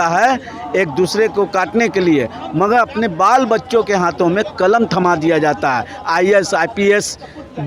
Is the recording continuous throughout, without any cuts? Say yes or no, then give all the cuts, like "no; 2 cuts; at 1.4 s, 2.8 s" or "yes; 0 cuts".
yes; 0 cuts